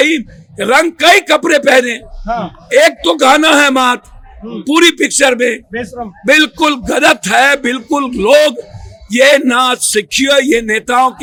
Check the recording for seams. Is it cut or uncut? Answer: uncut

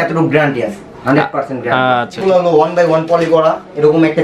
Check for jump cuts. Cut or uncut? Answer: cut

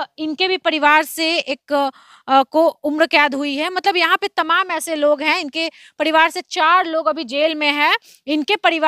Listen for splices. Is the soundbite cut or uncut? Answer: uncut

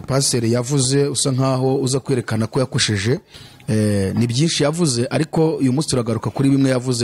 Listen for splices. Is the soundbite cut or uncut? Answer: uncut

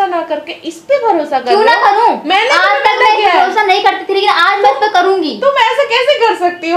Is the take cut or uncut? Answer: uncut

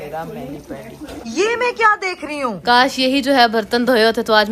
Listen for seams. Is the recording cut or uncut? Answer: cut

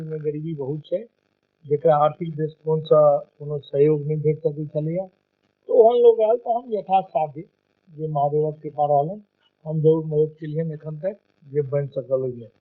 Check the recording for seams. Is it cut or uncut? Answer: cut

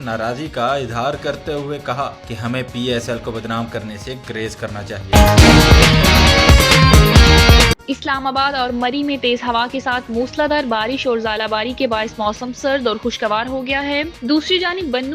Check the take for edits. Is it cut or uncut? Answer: cut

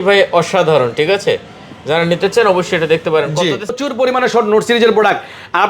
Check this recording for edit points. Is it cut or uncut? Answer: cut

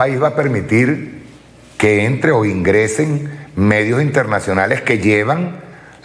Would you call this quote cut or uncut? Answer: uncut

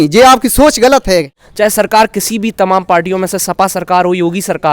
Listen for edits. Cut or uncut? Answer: cut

